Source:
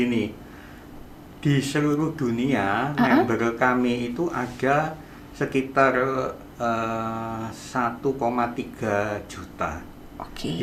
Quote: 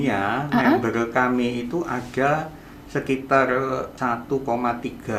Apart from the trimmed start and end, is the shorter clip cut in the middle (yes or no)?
yes